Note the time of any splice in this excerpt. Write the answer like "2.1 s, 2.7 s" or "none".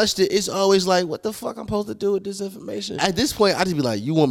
2.9 s